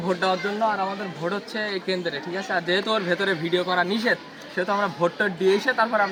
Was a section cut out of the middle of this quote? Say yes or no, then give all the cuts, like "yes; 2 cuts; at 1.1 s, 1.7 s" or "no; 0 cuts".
no; 0 cuts